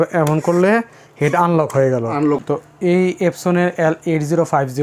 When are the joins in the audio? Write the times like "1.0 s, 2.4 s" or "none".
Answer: 2.4 s

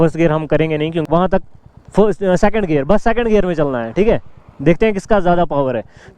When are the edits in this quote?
1.0 s

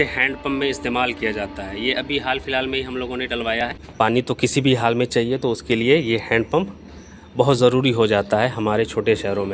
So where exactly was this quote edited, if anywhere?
3.8 s

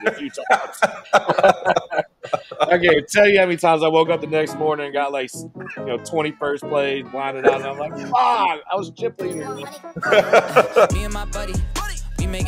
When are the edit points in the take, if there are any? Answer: 10.9 s

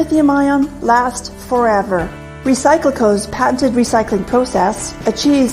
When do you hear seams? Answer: 1.2 s

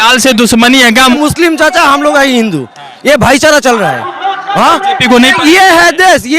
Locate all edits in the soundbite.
1.2 s

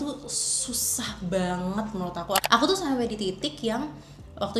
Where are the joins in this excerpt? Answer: 2.4 s

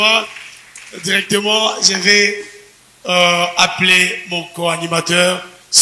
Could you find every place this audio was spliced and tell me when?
none

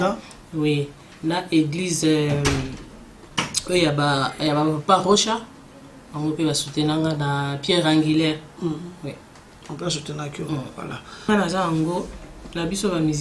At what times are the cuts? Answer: 11.3 s

